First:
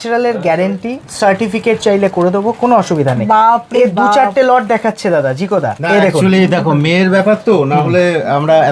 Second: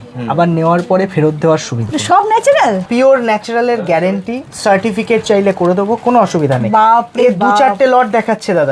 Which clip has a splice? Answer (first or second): second